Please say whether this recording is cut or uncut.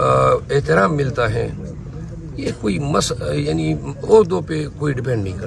uncut